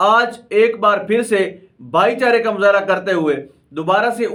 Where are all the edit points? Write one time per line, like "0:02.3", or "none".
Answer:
none